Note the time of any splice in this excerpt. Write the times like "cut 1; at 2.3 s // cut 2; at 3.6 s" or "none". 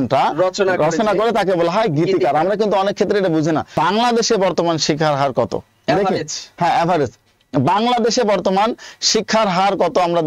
cut 1; at 3.7 s